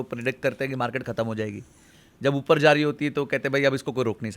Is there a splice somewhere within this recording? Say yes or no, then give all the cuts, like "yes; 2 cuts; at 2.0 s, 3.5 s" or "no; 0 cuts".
no; 0 cuts